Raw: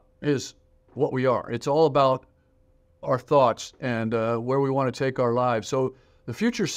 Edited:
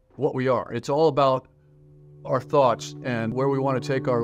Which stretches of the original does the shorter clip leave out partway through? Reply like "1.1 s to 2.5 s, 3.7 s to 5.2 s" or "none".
4.1 s to 4.4 s